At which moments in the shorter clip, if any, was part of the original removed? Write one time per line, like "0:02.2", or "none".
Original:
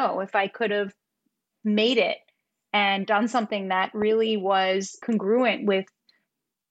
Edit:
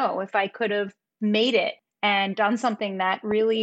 0:01.0
0:01.8